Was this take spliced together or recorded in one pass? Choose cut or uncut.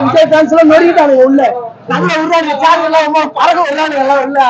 uncut